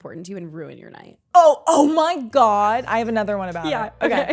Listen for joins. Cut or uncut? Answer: cut